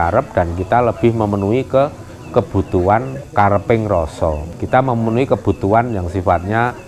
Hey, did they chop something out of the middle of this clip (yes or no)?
no